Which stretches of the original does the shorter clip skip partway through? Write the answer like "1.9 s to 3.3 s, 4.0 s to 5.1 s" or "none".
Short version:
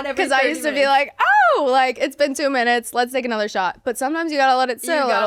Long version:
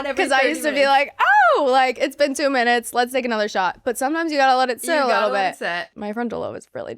none